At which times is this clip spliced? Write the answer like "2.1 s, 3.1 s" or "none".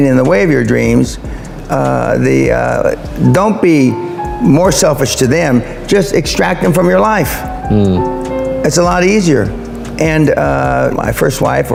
none